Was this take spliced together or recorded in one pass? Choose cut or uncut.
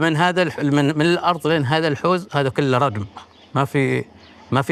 uncut